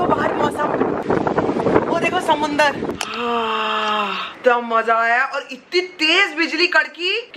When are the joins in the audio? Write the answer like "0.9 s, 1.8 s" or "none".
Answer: 1.0 s